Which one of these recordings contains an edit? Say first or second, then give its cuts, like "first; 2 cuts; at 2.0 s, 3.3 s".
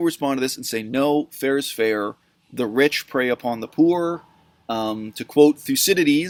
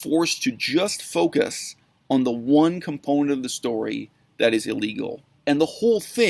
second; 1 cut; at 5.2 s